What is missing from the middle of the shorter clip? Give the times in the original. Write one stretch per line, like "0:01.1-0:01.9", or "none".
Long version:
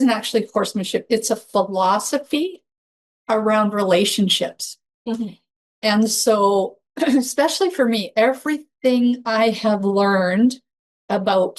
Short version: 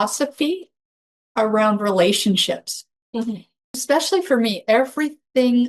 0:05.7-0:07.3